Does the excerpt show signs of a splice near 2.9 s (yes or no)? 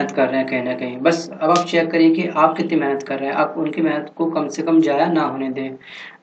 no